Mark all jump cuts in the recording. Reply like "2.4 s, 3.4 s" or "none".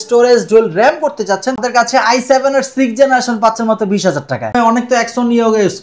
1.6 s, 4.5 s